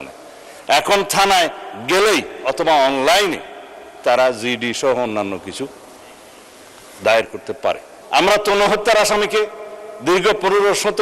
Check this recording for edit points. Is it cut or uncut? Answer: cut